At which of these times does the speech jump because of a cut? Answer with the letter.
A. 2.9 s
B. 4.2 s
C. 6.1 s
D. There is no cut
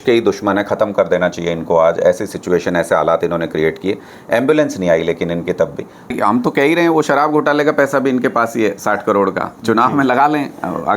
C